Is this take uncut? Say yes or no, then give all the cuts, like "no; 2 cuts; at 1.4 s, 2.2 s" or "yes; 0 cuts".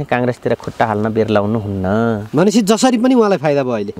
yes; 0 cuts